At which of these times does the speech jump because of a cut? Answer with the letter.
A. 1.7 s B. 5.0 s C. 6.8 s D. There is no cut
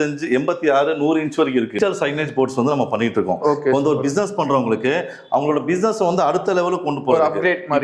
A